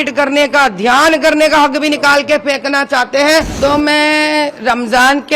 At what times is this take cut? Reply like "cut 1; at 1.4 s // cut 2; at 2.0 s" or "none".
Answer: cut 1; at 3.5 s